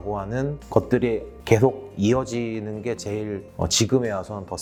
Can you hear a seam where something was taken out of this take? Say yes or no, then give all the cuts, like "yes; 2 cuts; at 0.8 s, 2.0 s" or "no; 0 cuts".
no; 0 cuts